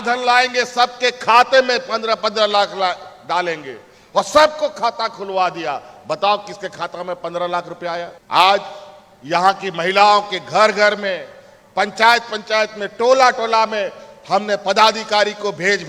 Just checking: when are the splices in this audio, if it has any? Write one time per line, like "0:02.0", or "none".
none

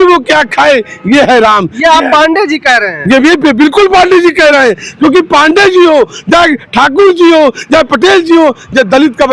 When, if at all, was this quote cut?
none

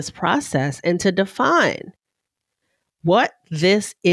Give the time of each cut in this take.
none

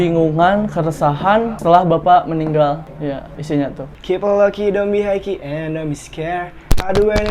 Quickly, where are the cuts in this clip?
0:03.9

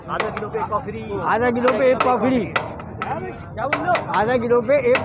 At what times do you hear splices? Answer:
none

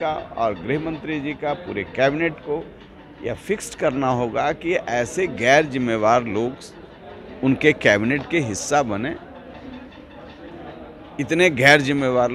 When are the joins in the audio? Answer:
none

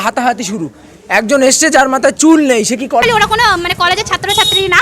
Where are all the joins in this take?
0:03.0

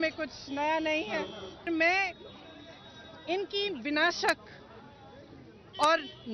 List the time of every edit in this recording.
0:01.7

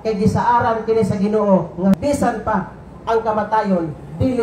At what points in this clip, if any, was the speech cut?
0:01.9

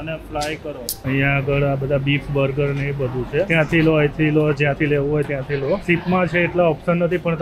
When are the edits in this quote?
0:01.0
0:03.5
0:05.8

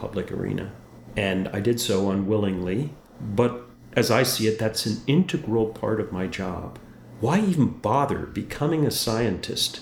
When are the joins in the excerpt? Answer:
0:04.8

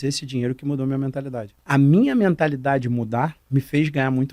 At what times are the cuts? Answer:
0:01.5
0:03.4

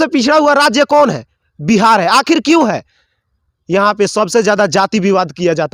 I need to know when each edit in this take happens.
none

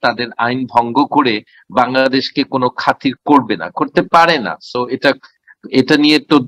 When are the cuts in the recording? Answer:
none

